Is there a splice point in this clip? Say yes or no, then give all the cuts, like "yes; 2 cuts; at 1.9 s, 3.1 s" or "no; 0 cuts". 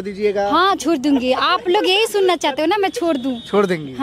no; 0 cuts